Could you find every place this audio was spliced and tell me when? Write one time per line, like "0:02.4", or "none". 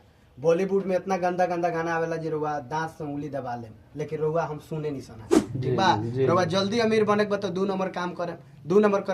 0:05.5